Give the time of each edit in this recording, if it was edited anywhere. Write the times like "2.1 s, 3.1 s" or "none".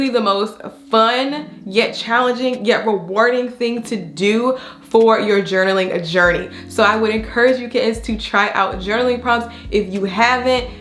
none